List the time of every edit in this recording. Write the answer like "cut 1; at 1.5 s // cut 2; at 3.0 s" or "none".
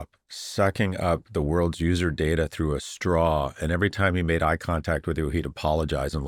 none